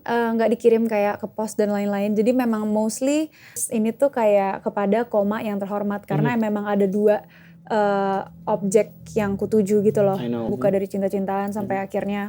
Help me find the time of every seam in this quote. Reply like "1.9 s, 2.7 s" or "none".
3.6 s, 10.5 s

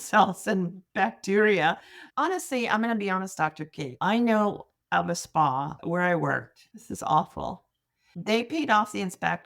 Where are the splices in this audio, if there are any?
none

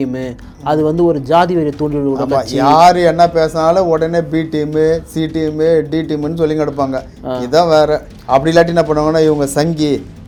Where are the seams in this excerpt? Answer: none

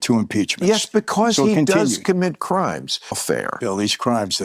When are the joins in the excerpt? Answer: 3.2 s

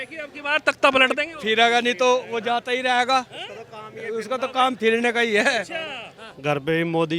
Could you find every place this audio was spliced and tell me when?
6.1 s

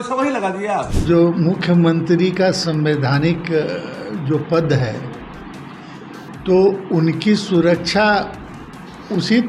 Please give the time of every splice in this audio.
0.9 s

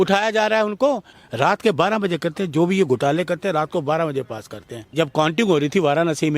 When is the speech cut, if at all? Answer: 1.1 s, 4.9 s

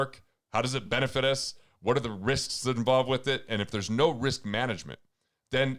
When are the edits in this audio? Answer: none

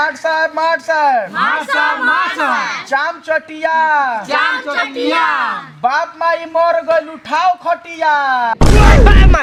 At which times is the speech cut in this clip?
none

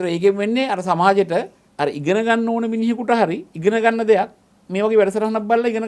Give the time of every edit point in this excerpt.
1.6 s, 3.5 s

